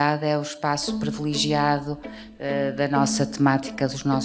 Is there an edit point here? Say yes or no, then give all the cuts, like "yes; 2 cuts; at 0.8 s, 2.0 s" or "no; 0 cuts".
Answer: no; 0 cuts